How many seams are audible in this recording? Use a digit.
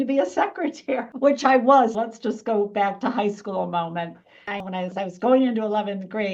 2